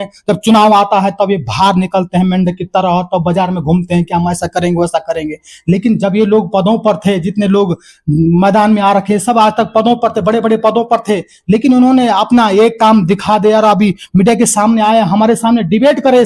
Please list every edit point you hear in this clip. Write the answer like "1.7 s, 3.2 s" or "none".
none